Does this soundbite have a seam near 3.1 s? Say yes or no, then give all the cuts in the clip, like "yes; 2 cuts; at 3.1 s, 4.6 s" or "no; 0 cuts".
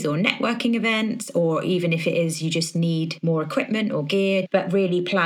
yes; 2 cuts; at 3.1 s, 4.5 s